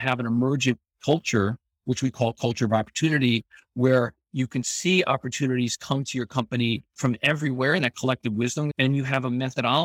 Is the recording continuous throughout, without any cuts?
no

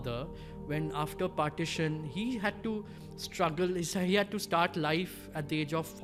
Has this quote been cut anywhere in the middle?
no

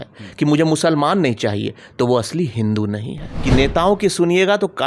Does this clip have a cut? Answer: yes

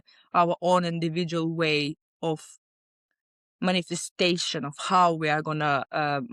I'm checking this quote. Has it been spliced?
no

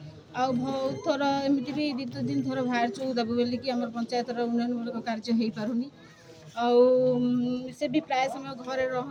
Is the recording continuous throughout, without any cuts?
yes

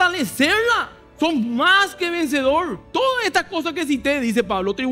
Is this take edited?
yes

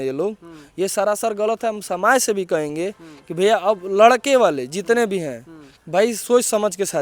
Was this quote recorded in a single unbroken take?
yes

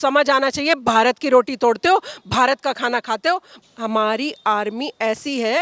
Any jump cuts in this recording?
yes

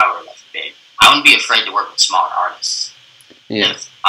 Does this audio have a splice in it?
no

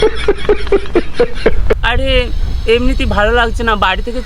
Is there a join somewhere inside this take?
yes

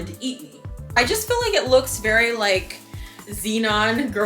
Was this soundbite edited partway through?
yes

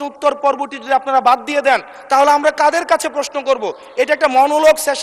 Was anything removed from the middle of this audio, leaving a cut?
no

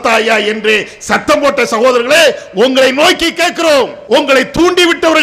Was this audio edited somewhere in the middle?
yes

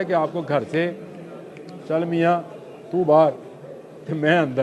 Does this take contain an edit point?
no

